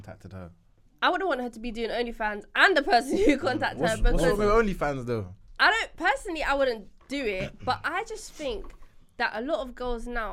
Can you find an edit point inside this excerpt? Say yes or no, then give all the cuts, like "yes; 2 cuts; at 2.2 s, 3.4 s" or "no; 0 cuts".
no; 0 cuts